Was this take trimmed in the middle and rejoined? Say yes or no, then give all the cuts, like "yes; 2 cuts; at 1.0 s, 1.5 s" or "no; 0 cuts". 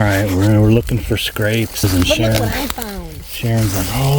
yes; 1 cut; at 1.8 s